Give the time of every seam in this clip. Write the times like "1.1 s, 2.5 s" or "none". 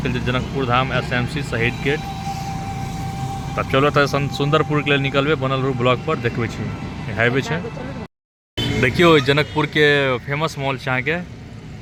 none